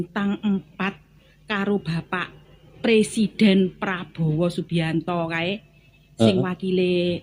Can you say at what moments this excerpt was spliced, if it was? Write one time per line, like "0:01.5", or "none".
none